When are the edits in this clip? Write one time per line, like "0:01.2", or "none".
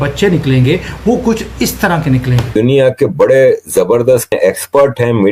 0:02.5
0:04.3